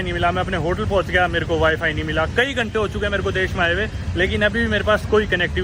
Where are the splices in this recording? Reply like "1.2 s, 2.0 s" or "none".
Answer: none